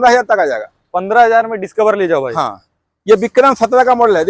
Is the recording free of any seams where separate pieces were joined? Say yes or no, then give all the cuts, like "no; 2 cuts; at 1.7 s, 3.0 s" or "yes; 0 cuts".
yes; 0 cuts